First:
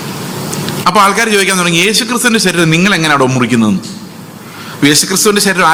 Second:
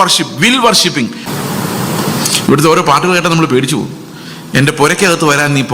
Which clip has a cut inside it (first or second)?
second